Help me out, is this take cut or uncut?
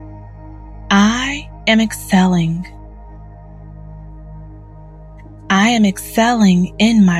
cut